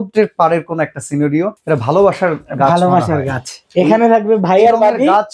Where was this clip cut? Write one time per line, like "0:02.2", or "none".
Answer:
0:01.6